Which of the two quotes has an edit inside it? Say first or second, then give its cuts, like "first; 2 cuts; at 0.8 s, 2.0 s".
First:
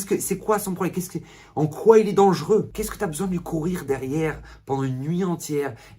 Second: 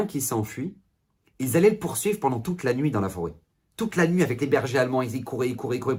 first; 1 cut; at 2.8 s